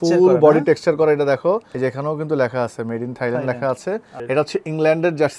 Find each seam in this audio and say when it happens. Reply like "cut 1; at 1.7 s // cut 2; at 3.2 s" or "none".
cut 1; at 1.7 s // cut 2; at 4.1 s